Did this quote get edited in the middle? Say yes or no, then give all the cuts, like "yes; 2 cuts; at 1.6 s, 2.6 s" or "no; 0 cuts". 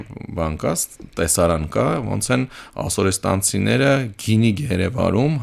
no; 0 cuts